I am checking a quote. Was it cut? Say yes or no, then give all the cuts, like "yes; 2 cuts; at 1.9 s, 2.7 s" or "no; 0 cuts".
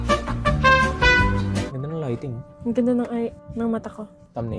yes; 1 cut; at 1.7 s